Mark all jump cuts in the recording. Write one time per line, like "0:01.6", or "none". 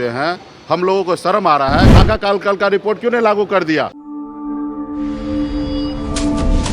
0:01.9
0:04.0